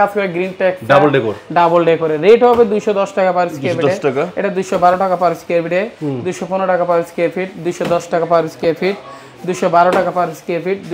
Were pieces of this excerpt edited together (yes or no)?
no